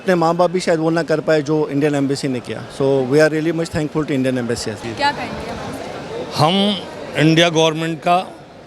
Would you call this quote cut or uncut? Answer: cut